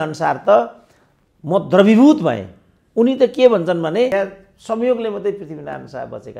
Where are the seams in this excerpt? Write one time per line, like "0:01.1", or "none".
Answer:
0:04.1

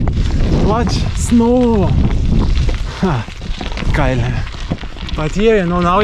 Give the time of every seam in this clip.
none

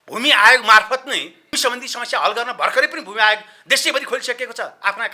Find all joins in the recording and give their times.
0:01.5

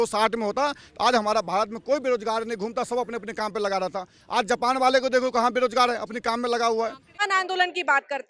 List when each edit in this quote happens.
none

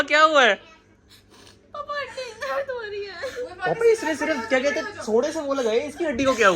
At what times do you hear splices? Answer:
none

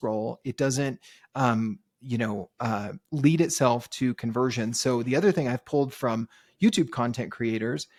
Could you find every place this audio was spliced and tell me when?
none

